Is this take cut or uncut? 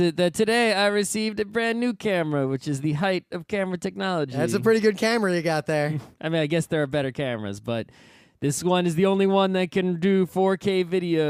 uncut